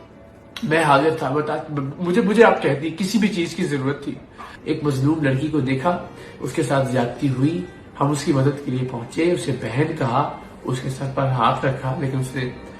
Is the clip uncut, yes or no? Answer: no